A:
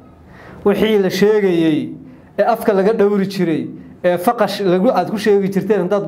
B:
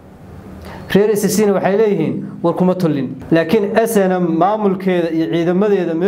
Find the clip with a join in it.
B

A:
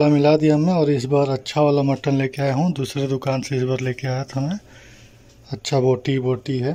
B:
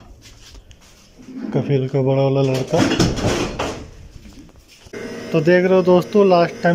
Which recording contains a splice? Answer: B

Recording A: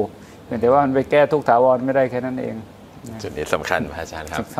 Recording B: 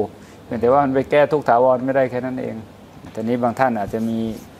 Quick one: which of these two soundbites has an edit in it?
B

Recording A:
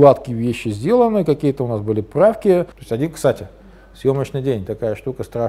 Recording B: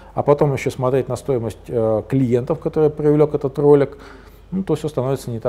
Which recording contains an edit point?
A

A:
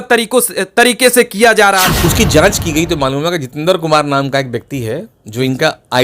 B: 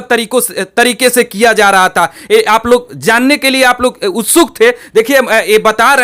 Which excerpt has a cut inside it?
A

